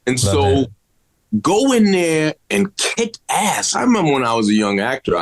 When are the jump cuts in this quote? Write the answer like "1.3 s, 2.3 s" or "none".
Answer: 3.6 s